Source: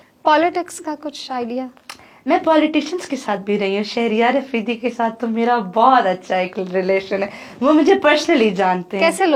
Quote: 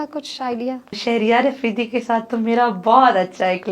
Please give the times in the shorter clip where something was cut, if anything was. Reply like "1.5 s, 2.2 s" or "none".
1.0 s